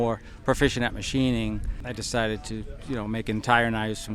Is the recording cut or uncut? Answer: cut